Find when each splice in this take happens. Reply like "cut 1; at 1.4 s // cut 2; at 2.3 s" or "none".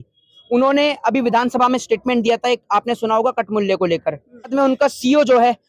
cut 1; at 4.5 s